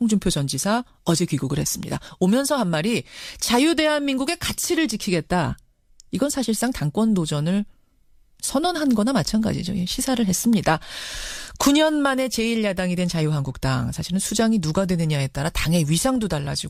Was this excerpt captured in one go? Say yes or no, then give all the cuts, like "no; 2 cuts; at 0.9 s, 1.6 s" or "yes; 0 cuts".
yes; 0 cuts